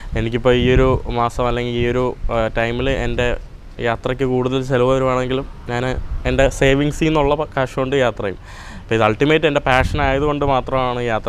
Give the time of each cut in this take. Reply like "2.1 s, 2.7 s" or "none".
none